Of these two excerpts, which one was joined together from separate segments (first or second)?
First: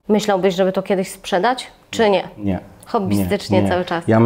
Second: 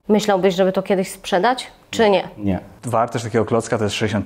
second